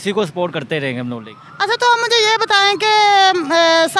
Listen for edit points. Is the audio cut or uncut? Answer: cut